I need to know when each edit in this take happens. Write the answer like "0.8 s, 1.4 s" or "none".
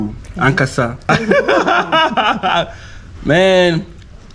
1.1 s